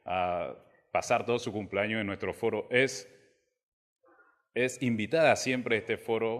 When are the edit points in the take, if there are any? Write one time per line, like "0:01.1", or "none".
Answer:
0:02.9